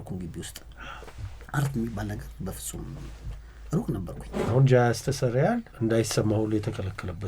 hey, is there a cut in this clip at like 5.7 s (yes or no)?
yes